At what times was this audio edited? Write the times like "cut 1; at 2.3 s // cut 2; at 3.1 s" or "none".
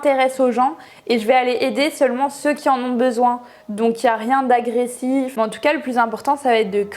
cut 1; at 5.3 s